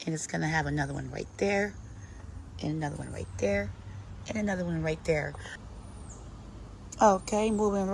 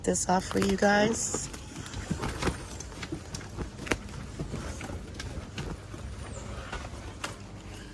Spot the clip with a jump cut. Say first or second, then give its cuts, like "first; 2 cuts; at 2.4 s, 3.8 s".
first; 1 cut; at 5.6 s